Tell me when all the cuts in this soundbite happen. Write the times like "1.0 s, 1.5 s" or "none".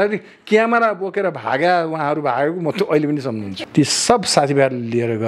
3.5 s

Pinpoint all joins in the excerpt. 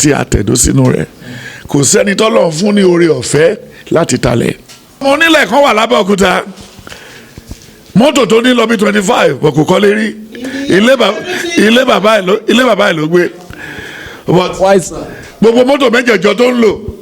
5.0 s

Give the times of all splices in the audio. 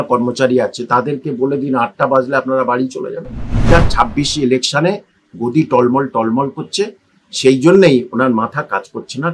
3.7 s

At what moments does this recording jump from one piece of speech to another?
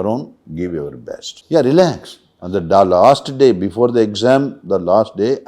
1.3 s

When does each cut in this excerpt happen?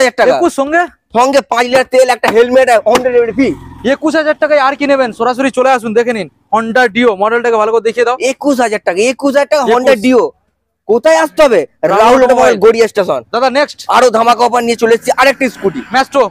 none

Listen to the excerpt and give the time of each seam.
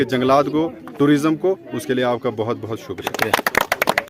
3.1 s

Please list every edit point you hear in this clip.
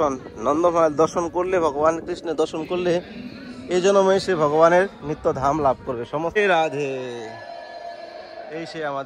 6.4 s

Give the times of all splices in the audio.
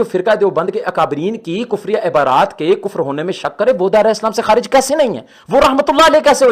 5.3 s

